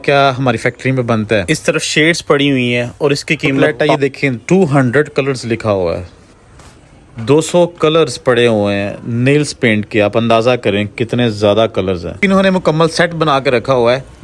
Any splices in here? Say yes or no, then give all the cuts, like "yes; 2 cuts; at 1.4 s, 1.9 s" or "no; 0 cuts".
yes; 3 cuts; at 1.4 s, 3.7 s, 12.2 s